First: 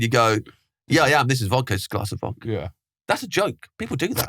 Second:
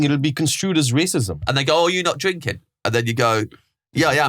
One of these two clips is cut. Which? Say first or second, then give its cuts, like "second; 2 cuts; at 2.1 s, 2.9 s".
second; 1 cut; at 1.3 s